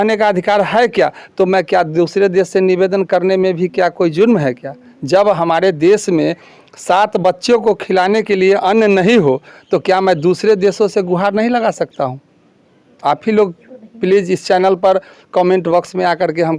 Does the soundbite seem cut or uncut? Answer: uncut